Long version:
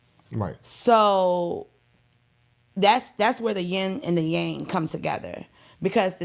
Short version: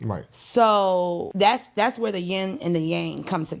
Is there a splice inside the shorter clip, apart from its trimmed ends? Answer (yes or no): yes